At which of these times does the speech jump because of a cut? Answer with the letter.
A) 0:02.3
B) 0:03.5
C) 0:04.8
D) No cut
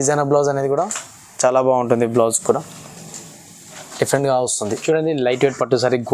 C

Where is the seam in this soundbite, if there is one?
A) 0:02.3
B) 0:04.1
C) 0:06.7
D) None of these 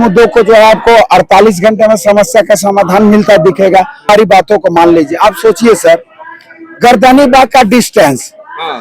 B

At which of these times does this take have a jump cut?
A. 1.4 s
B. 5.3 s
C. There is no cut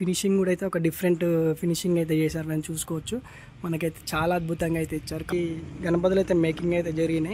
B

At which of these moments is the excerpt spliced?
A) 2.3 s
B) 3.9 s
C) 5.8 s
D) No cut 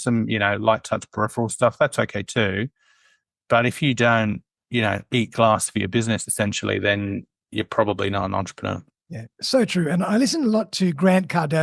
D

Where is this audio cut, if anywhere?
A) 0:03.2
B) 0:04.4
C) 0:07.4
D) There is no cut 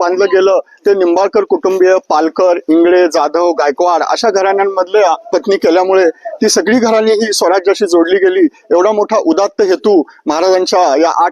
D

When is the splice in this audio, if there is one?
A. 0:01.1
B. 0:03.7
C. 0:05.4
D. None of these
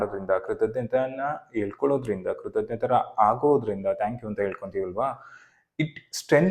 D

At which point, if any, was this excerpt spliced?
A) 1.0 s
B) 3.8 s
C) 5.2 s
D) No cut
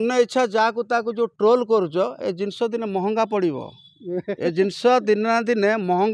D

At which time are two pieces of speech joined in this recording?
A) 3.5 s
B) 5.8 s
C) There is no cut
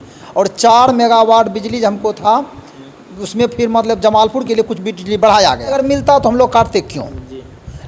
B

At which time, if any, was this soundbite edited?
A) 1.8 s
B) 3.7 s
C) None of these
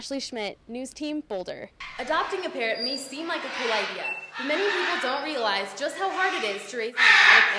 A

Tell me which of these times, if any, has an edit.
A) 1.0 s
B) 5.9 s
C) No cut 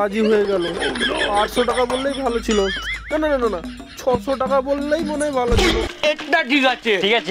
B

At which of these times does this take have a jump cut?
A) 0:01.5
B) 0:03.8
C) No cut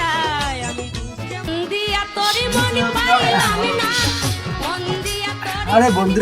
A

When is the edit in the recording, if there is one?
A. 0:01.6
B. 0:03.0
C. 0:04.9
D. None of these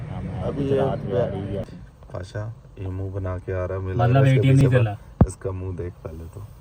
A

